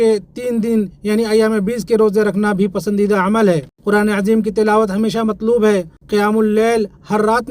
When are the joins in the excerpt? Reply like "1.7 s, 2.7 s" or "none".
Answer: 3.7 s, 5.9 s